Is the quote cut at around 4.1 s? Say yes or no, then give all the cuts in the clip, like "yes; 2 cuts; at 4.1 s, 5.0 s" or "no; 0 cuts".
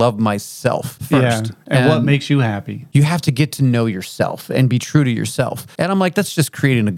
no; 3 cuts; at 1.0 s, 2.7 s, 5.6 s